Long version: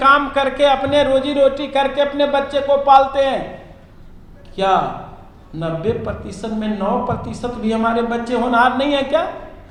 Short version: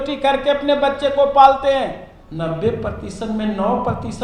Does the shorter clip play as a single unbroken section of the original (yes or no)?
no